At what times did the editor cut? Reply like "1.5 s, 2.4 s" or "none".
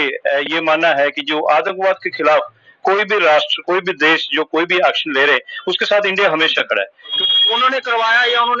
7.1 s